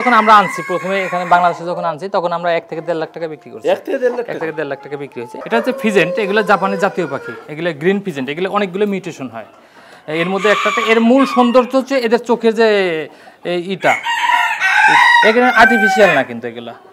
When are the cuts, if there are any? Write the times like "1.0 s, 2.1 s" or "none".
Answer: 5.4 s